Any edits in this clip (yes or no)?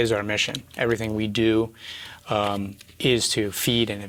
no